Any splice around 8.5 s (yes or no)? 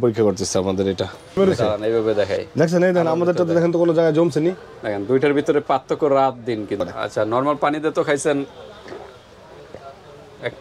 no